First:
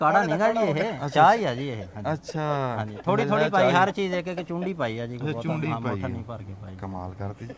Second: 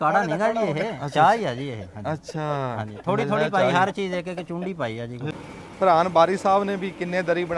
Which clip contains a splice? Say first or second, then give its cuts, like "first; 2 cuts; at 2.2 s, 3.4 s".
second; 1 cut; at 5.4 s